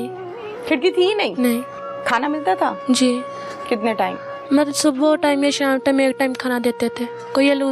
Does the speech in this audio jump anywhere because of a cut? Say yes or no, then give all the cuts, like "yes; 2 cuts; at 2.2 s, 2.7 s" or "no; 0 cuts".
no; 0 cuts